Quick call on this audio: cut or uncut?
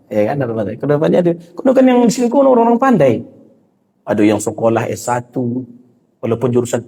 uncut